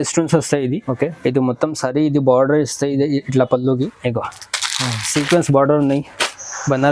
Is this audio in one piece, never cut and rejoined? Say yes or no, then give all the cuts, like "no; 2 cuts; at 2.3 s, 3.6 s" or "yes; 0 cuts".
no; 1 cut; at 3.9 s